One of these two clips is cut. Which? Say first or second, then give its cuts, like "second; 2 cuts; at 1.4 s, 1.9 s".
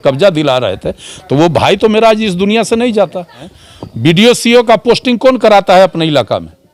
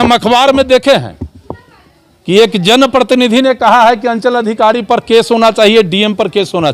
first; 1 cut; at 3.5 s